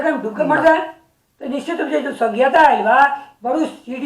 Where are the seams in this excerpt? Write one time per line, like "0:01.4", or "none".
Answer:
none